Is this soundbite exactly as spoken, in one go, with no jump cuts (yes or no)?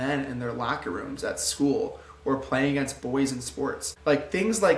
no